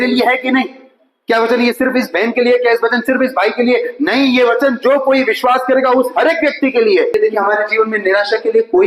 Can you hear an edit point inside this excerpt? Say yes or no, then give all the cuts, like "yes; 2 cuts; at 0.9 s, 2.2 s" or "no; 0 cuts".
yes; 1 cut; at 7.1 s